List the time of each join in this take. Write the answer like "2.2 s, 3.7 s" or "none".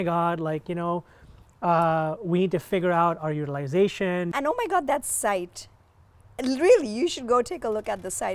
4.3 s